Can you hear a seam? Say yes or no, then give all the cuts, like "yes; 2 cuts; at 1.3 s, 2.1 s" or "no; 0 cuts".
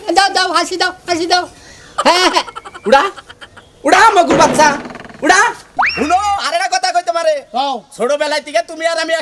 yes; 1 cut; at 5.6 s